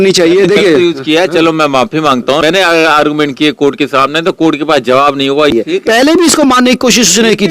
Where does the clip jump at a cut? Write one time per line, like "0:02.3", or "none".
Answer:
0:02.4
0:05.5